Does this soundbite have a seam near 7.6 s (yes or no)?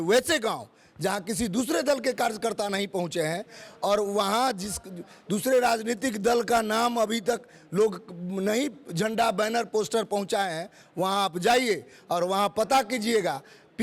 no